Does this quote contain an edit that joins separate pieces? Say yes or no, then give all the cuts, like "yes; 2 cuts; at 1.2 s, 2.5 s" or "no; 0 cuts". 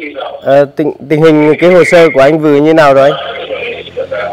no; 0 cuts